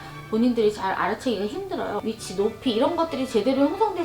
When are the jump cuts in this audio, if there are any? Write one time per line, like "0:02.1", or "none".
0:02.0